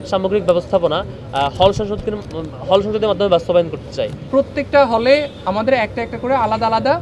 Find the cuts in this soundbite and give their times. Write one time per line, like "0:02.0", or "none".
0:04.2